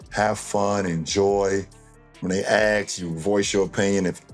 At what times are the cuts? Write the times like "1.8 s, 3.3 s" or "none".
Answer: 1.8 s